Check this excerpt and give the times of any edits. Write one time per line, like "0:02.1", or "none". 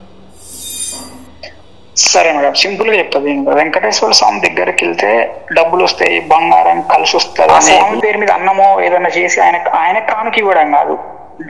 0:07.6